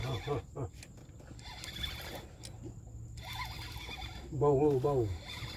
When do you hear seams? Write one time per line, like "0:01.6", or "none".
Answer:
none